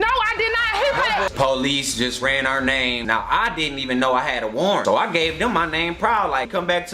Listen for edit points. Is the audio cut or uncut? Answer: cut